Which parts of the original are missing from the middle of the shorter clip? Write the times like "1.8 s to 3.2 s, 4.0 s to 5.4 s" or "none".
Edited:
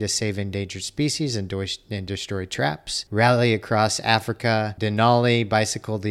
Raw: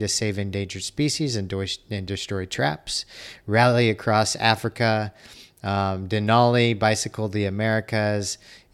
2.9 s to 3.3 s, 5.1 s to 6.1 s